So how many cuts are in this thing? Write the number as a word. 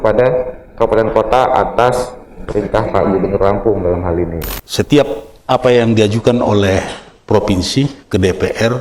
one